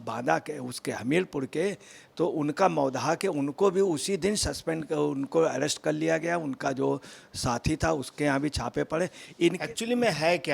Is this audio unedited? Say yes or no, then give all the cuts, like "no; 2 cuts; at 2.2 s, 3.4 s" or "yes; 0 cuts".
no; 1 cut; at 9.6 s